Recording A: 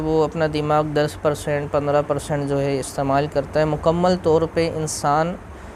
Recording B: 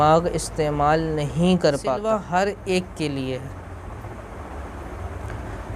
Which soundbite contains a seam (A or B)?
B